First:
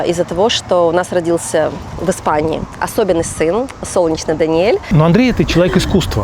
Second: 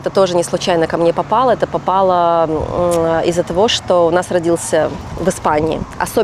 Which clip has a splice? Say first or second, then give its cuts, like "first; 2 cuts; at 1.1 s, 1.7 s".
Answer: first; 1 cut; at 4.8 s